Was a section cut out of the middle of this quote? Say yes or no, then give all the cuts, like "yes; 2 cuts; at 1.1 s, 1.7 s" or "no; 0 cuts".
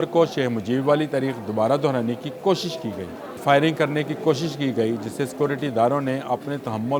yes; 1 cut; at 3.4 s